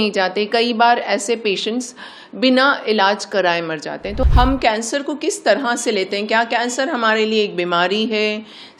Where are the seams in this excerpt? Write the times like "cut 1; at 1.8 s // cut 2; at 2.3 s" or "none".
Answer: cut 1; at 4.2 s